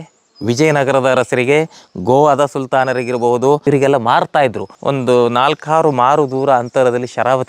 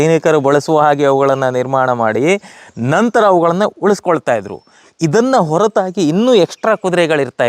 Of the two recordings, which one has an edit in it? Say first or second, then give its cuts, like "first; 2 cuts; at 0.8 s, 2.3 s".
first; 2 cuts; at 3.6 s, 4.7 s